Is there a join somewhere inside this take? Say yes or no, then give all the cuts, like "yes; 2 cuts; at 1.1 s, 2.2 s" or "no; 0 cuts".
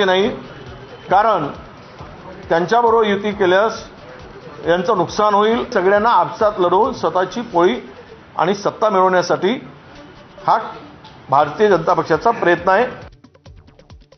no; 0 cuts